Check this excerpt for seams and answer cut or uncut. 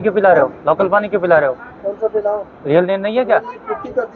uncut